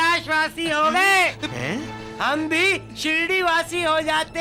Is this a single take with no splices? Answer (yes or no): yes